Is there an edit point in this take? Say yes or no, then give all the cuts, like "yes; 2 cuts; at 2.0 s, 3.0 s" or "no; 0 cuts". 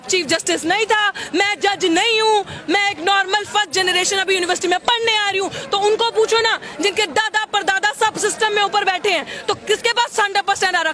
no; 0 cuts